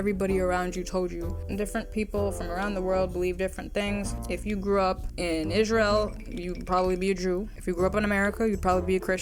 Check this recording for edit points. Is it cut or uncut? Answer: uncut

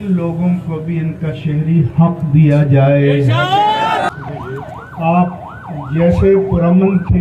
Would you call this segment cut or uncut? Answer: cut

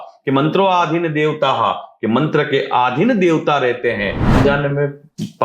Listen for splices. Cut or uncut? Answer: cut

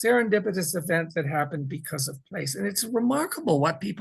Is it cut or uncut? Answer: uncut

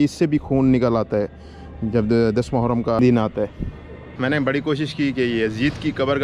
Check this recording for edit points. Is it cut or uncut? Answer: cut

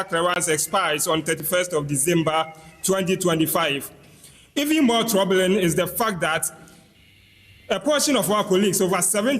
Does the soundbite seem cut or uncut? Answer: uncut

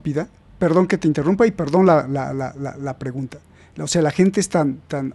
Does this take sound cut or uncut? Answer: uncut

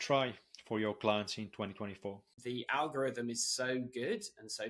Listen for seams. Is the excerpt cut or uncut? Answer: cut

